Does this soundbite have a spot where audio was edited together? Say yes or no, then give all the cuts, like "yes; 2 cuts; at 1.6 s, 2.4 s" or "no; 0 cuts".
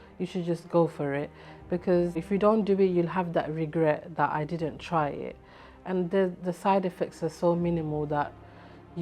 yes; 1 cut; at 2.2 s